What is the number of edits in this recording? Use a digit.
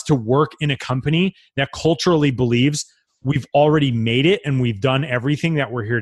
0